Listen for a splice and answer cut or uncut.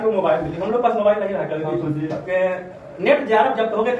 uncut